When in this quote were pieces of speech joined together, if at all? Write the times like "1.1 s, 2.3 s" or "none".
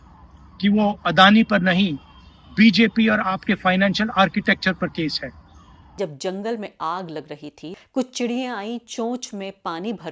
5.9 s, 7.6 s